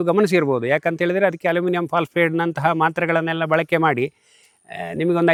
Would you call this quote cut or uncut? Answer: uncut